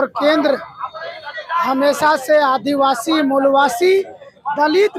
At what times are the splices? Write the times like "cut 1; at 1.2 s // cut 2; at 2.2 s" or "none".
none

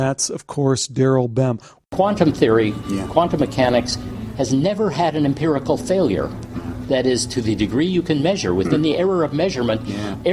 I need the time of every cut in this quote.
cut 1; at 1.7 s

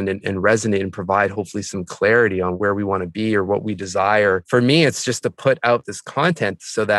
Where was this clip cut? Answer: cut 1; at 2.5 s // cut 2; at 4.4 s // cut 3; at 6.0 s

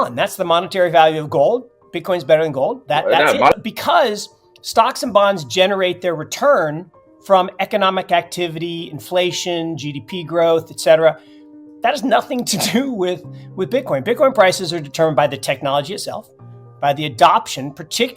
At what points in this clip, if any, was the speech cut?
cut 1; at 3.5 s

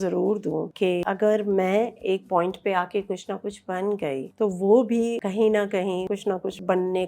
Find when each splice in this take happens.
cut 1; at 0.9 s // cut 2; at 4.3 s // cut 3; at 5.2 s // cut 4; at 6.0 s

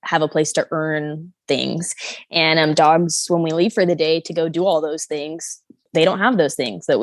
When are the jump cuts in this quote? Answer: cut 1; at 5.8 s

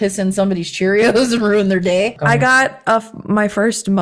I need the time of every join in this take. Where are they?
cut 1; at 2.1 s

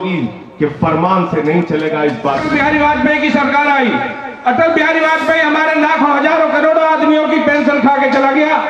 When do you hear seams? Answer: cut 1; at 2.4 s

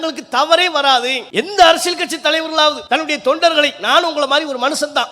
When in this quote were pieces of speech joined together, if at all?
cut 1; at 1.2 s // cut 2; at 2.8 s

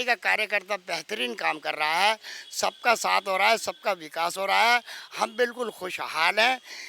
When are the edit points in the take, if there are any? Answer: none

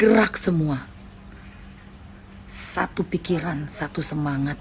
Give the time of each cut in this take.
none

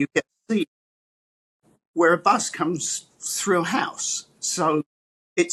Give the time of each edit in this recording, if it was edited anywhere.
none

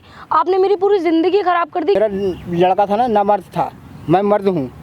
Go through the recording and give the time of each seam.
cut 1; at 2.0 s

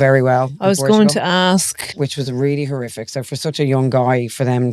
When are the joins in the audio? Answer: none

